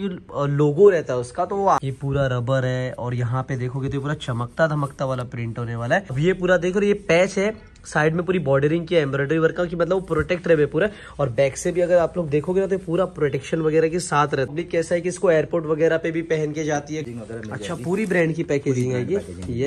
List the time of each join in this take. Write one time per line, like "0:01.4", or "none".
0:01.8
0:06.1
0:14.6
0:17.0